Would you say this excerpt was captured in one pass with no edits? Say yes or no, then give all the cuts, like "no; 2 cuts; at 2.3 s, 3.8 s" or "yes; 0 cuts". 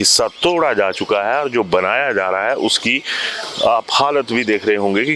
yes; 0 cuts